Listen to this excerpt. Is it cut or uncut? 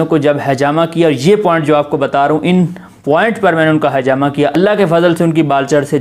cut